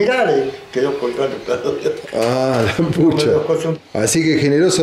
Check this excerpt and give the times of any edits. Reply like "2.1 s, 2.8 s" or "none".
3.7 s

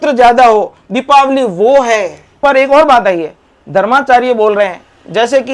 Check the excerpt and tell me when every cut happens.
2.2 s

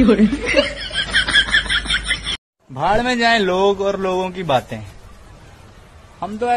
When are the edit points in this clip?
2.4 s

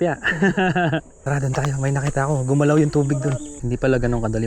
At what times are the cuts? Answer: 1.1 s, 3.5 s

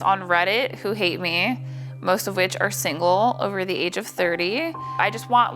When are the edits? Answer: none

